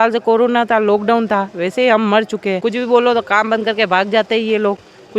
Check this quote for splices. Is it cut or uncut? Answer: cut